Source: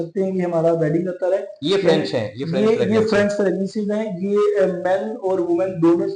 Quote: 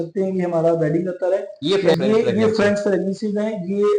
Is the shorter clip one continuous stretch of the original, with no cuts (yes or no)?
no